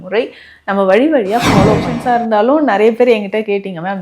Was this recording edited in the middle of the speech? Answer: yes; 1 cut; at 1.9 s

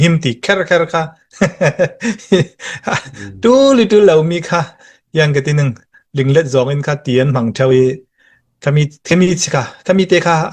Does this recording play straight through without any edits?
yes; 0 cuts

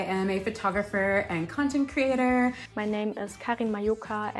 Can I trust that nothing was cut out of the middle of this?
no; 1 cut; at 2.7 s

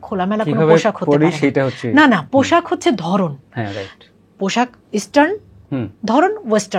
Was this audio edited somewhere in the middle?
no; 0 cuts

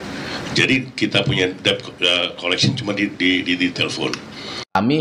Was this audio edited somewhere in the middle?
no; 0 cuts

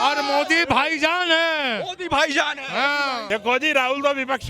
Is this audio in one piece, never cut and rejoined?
no; 1 cut; at 3.2 s

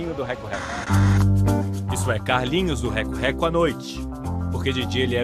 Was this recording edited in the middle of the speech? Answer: yes; 1 cut; at 2.4 s

